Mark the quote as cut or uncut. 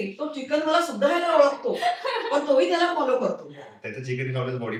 uncut